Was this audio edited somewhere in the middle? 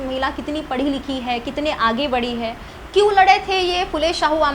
yes; 1 cut; at 2.7 s

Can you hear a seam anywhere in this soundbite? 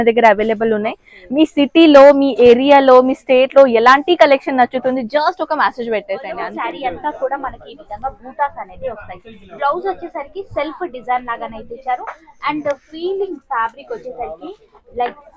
yes; 1 cut; at 6.4 s

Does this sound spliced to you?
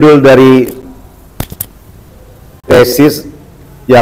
no; 0 cuts

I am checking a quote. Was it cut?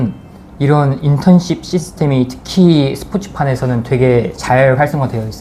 no; 0 cuts

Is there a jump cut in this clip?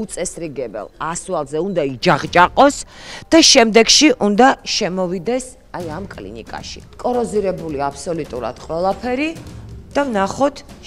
yes; 1 cut; at 6.9 s

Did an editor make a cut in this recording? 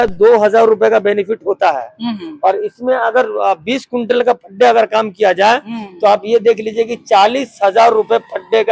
no; 0 cuts

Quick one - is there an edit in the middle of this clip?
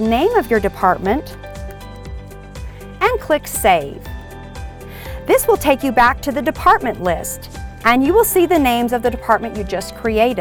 no; 0 cuts

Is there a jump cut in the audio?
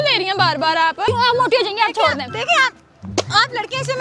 yes; 1 cut; at 1.1 s

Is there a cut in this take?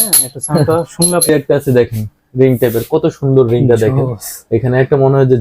yes; 1 cut; at 1.3 s

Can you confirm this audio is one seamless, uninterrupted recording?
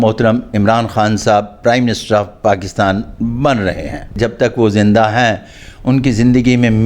no; 1 cut; at 4.1 s

